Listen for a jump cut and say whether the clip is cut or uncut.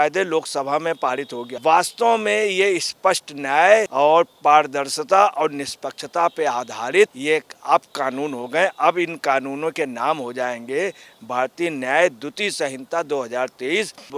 cut